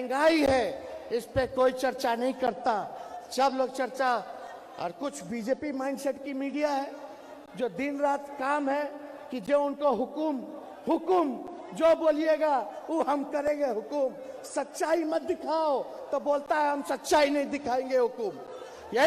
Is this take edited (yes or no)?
no